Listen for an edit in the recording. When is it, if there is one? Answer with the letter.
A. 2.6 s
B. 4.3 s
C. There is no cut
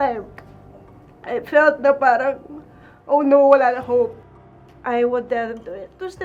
B